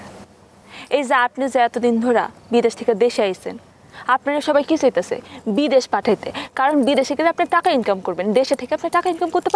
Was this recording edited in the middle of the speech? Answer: no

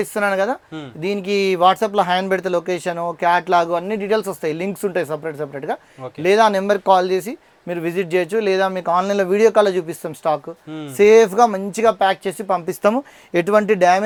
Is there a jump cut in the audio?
no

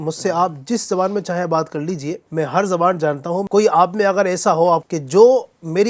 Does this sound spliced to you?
yes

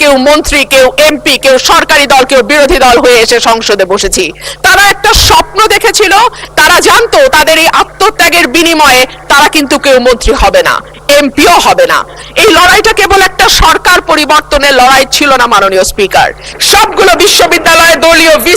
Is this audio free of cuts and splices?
no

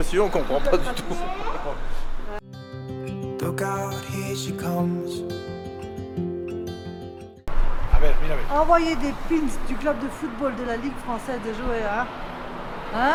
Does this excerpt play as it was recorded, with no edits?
yes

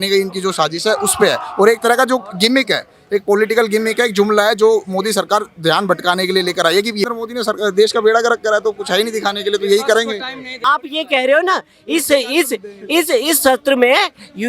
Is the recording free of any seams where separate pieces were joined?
no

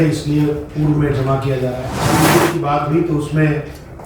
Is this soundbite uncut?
no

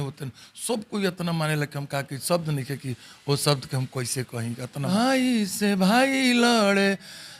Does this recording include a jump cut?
yes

